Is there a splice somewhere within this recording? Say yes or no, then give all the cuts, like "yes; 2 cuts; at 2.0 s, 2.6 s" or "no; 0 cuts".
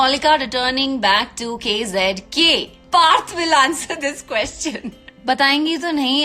yes; 2 cuts; at 2.8 s, 5.1 s